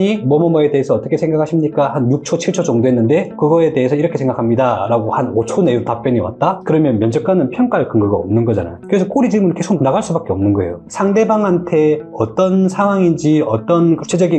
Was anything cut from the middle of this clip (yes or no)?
yes